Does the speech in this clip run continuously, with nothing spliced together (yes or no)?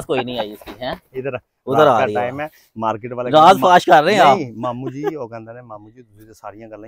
yes